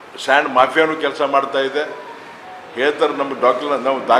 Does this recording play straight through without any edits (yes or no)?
yes